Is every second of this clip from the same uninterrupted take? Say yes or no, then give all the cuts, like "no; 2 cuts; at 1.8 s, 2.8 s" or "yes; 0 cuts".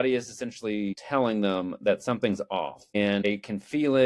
no; 2 cuts; at 1.0 s, 3.2 s